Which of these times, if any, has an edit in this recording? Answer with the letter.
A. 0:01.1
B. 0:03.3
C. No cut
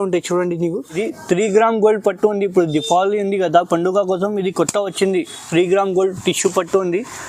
A